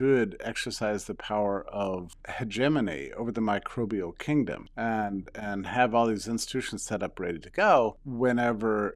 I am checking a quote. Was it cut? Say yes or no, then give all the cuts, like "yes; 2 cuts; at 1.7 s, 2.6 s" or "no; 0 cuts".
yes; 3 cuts; at 2.2 s, 4.6 s, 8.0 s